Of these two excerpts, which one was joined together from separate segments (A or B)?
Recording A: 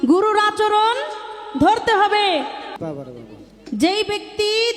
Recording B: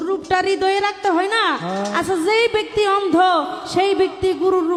A